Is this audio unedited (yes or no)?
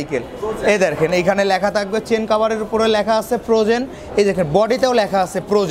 yes